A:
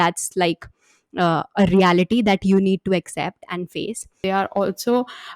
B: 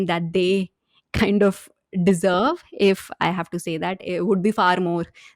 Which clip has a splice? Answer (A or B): A